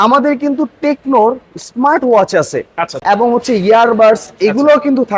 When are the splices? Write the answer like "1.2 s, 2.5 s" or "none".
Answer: 2.9 s